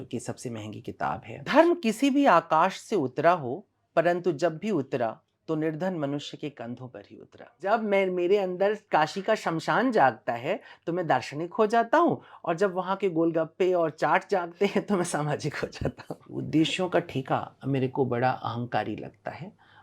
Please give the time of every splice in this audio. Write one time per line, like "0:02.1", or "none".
0:01.3
0:07.6
0:16.3